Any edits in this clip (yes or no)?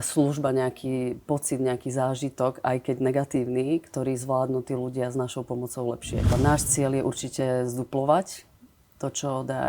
yes